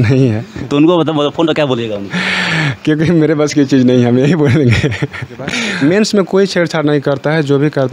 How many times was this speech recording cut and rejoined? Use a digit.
1